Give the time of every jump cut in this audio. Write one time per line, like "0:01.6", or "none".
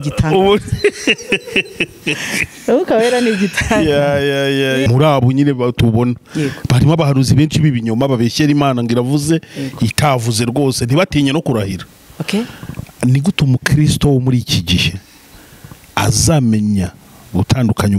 0:04.9